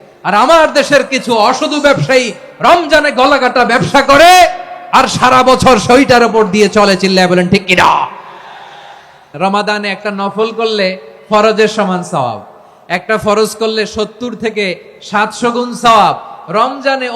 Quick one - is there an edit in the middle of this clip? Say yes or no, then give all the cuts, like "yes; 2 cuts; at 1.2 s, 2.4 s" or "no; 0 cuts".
yes; 1 cut; at 9.3 s